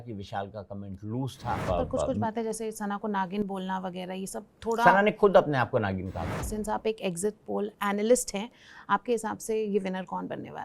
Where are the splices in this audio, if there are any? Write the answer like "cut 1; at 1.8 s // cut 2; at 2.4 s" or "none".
cut 1; at 1.6 s // cut 2; at 6.2 s